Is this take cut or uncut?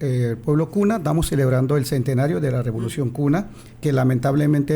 cut